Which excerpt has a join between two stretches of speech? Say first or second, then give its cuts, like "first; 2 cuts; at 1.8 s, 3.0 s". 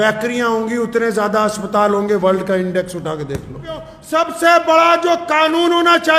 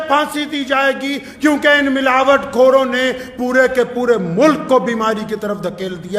first; 1 cut; at 4.0 s